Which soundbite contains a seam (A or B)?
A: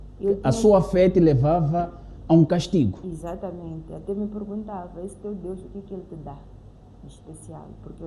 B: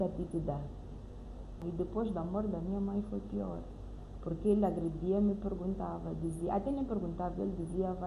B